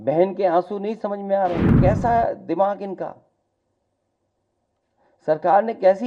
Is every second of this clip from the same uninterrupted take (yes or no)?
no